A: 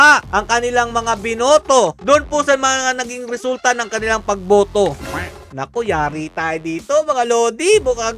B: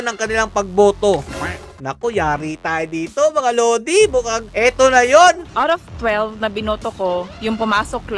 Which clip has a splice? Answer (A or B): B